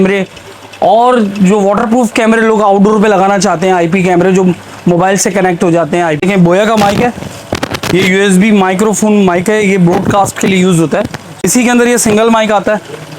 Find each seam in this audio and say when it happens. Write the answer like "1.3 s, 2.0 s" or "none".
6.2 s, 11.5 s